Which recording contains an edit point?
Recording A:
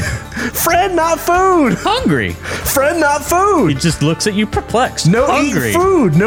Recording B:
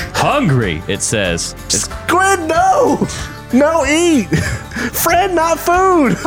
B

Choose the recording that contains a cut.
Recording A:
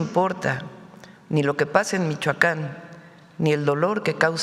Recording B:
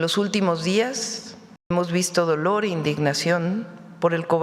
B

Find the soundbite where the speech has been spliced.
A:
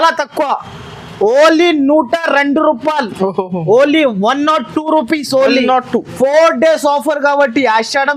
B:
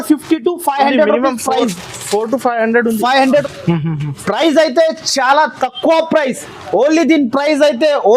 B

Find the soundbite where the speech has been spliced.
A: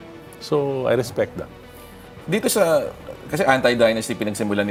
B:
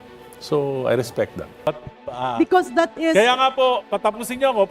B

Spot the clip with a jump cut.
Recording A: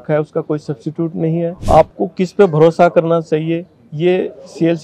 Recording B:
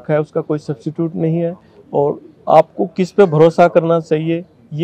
A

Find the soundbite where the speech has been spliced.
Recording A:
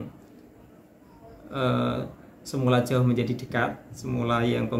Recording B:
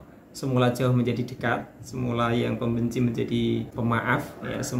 B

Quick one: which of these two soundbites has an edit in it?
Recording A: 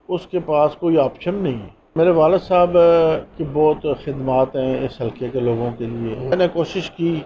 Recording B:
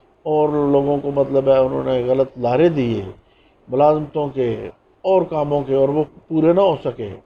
A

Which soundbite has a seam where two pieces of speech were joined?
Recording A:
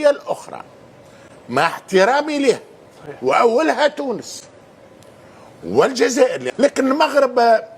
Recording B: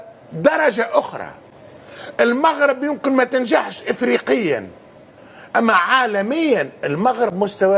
A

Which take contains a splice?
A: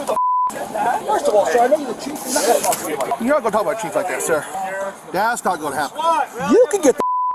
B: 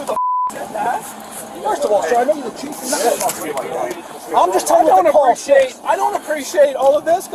A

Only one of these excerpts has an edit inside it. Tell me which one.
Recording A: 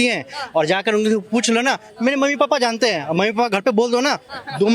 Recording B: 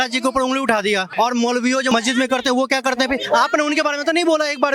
B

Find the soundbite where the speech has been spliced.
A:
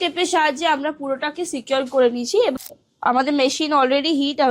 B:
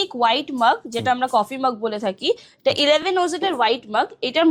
A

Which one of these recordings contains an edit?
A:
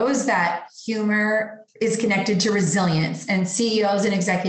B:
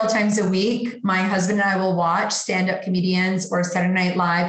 A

